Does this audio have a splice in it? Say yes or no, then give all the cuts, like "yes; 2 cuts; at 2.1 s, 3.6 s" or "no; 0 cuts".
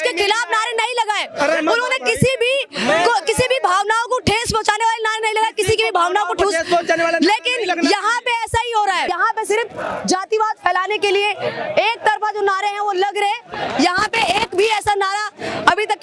yes; 1 cut; at 9.1 s